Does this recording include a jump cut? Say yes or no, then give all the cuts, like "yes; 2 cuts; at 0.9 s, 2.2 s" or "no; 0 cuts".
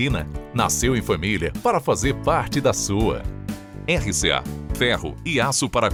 no; 0 cuts